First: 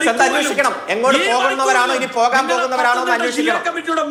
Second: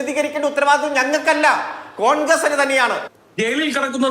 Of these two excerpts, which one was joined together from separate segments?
second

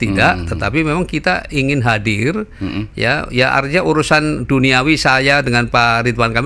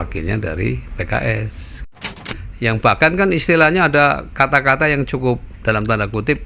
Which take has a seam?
second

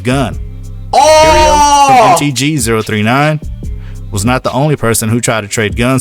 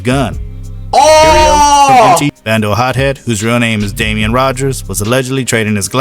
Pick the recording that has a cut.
second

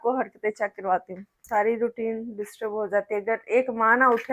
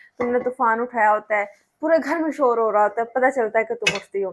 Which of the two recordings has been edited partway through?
first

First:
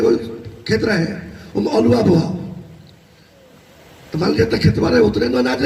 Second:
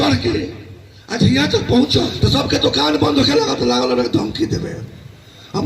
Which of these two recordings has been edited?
second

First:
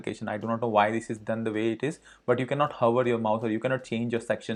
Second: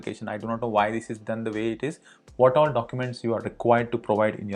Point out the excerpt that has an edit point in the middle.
second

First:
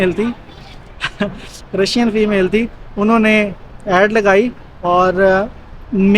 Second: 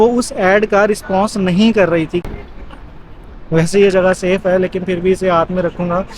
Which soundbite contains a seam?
second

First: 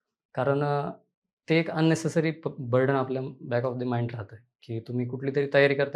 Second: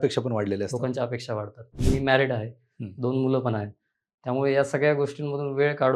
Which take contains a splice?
second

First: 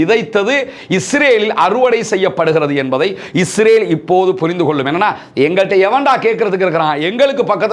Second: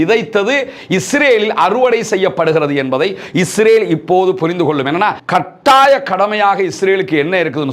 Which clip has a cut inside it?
second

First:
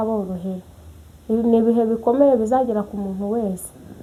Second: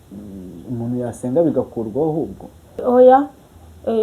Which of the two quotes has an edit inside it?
second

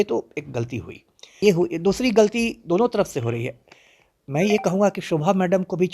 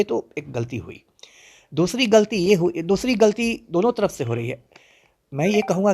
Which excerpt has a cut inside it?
first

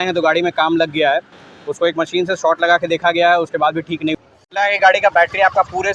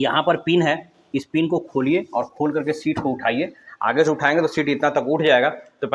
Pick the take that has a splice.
first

